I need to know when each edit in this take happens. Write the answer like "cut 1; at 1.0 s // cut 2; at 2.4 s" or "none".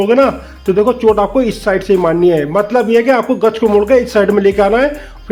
none